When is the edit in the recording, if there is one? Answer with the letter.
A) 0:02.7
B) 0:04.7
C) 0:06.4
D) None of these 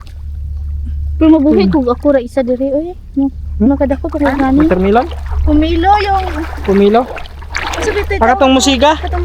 B